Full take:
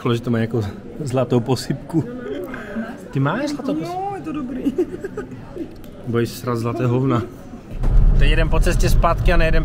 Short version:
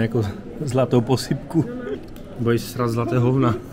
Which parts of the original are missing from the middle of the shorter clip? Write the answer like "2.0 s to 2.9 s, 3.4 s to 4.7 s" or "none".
2.4 s to 5.7 s